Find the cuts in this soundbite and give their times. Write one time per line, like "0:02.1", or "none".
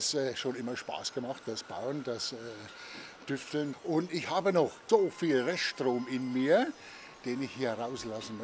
0:03.7
0:04.8